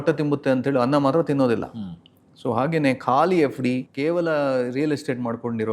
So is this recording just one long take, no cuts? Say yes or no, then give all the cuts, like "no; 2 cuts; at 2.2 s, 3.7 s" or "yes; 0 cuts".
no; 1 cut; at 3.9 s